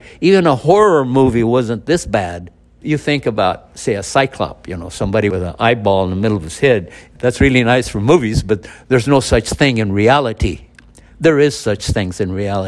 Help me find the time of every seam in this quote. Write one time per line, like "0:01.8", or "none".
0:02.8
0:05.3